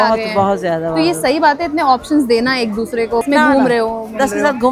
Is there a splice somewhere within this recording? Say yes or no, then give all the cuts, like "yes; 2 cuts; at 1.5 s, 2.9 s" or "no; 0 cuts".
yes; 1 cut; at 3.3 s